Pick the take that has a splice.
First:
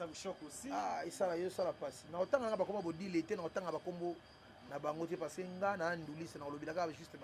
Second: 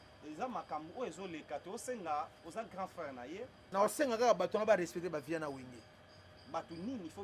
second; 1 cut; at 3.6 s

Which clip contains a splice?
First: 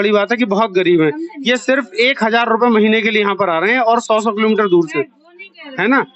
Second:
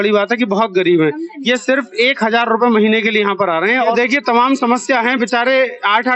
second; 1 cut; at 3.9 s

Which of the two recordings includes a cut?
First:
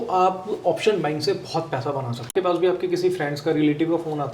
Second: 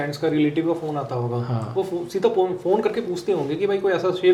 first; 1 cut; at 2.3 s

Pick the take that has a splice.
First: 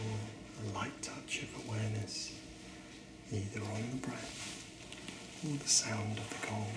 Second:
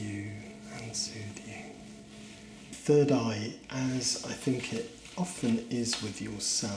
second; 1 cut; at 2.7 s

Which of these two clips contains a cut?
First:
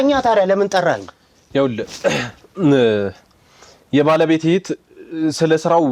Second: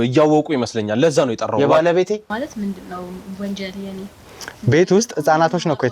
second; 1 cut; at 2.4 s

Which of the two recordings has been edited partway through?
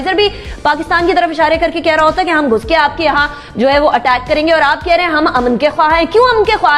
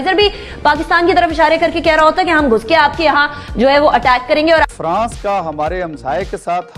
second; 1 cut; at 4.7 s

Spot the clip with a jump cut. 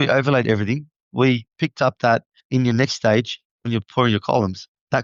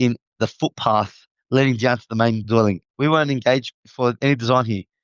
second; 2 cuts; at 2.9 s, 3.7 s

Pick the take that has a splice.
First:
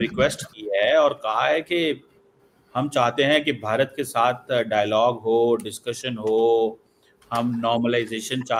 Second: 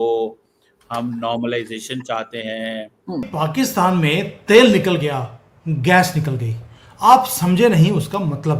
second; 1 cut; at 3.3 s

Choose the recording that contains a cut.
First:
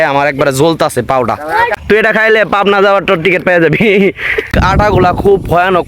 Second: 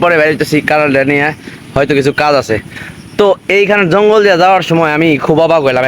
first; 2 cuts; at 1.8 s, 4.5 s

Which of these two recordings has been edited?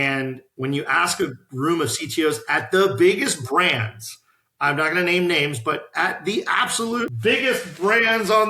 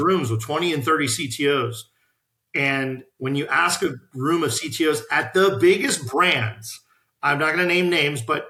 first; 1 cut; at 7.2 s

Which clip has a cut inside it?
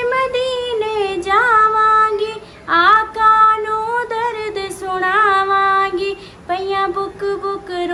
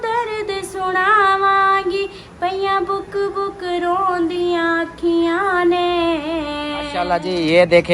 second; 1 cut; at 7.0 s

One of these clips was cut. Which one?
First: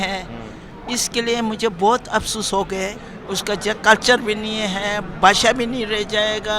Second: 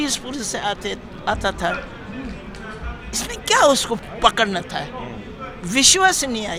first; 1 cut; at 3.1 s

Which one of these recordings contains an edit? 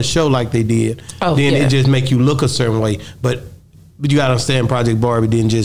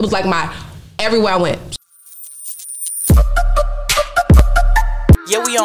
second; 1 cut; at 1.7 s

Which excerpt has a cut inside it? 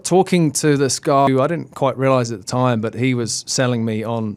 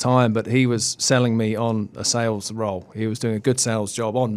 first; 1 cut; at 1.3 s

